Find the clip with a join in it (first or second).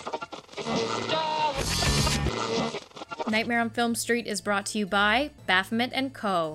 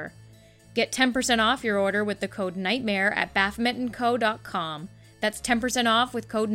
first